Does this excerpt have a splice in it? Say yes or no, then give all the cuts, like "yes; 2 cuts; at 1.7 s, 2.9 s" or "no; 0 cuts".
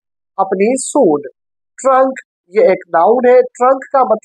no; 0 cuts